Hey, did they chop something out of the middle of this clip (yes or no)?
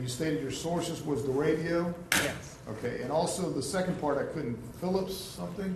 no